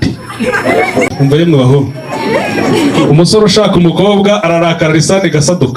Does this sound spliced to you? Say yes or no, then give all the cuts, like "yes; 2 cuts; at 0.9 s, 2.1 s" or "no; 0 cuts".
yes; 1 cut; at 1.1 s